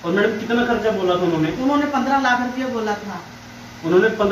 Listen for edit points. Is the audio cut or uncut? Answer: uncut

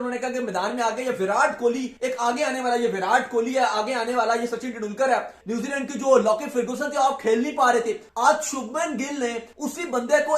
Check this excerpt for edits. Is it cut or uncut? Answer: cut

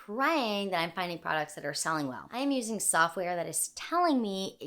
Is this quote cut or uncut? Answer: cut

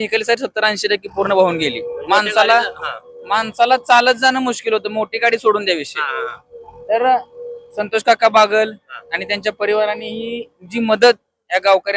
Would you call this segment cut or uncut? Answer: uncut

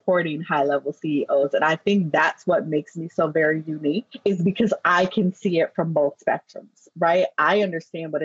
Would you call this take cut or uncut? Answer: cut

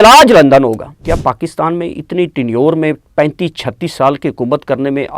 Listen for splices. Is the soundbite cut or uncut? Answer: cut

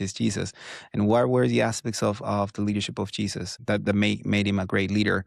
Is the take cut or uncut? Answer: cut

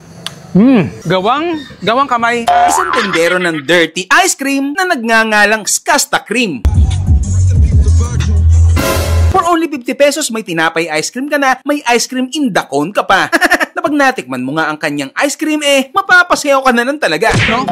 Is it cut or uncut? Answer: cut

